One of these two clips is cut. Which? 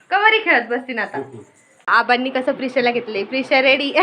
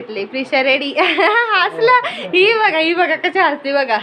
first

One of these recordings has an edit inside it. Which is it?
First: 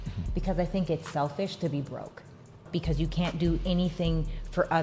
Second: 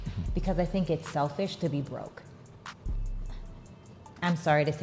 first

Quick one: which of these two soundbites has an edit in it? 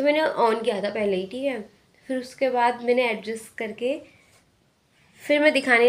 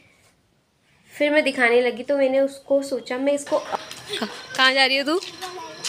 second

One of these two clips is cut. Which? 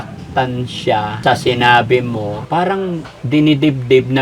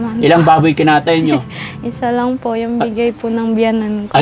first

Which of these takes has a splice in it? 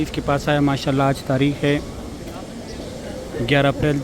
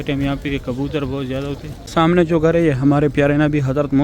second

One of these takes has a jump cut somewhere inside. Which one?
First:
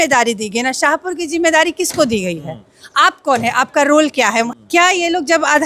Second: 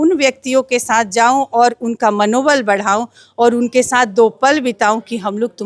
first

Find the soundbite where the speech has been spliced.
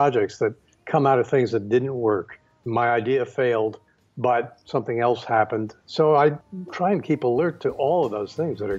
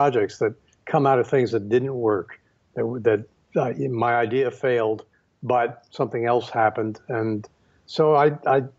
first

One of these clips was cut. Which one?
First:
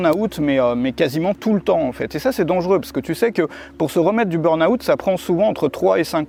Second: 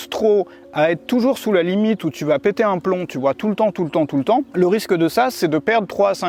second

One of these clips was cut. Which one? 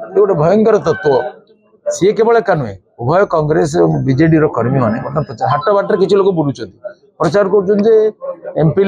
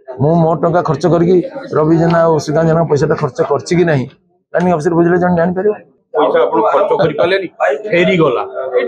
second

